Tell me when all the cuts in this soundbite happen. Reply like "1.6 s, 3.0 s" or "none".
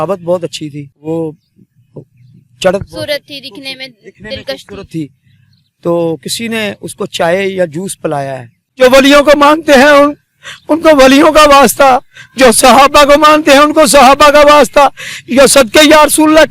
0.9 s, 8.6 s